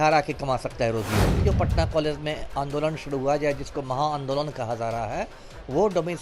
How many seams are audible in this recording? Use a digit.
1